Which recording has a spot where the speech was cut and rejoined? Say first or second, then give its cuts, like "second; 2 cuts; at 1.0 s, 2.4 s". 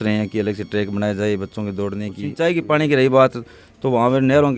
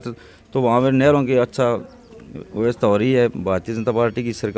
first; 1 cut; at 2.2 s